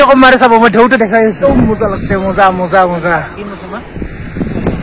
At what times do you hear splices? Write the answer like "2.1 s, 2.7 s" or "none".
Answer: 1.4 s